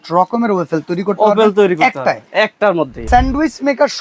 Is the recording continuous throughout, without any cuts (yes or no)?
no